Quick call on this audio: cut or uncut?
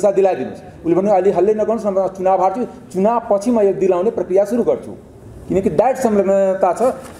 uncut